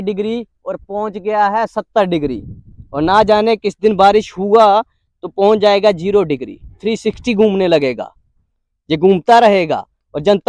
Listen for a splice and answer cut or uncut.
uncut